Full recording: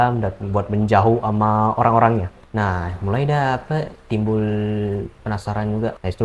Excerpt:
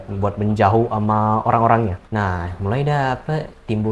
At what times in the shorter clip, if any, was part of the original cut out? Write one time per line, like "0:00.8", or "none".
0:02.0